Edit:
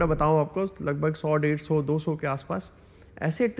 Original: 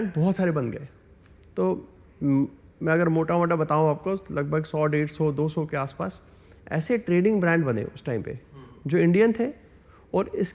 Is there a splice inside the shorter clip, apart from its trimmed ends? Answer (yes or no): no